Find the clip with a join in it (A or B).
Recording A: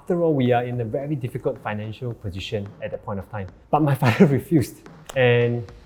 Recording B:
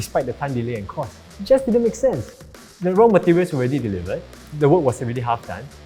B